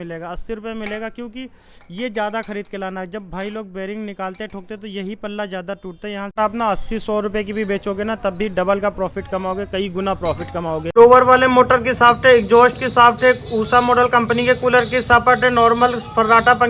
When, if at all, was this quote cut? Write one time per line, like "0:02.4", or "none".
0:06.4
0:10.9